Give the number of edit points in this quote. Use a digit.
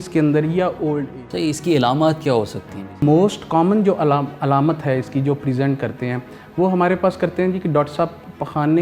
2